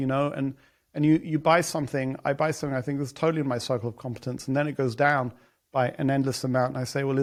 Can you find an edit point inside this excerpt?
no; 0 cuts

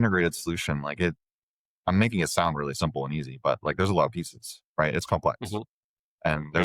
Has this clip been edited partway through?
no; 0 cuts

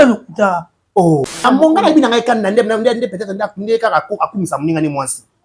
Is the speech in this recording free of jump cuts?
no; 1 cut; at 1.4 s

